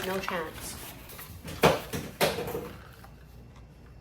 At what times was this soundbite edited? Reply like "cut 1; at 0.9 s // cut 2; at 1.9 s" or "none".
cut 1; at 1.0 s